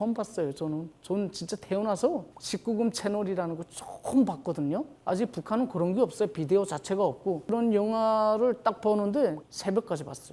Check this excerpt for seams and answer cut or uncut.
cut